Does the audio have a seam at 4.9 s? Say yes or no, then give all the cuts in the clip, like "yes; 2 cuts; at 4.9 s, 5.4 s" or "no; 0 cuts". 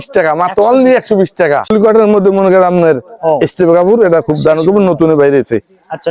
no; 1 cut; at 1.7 s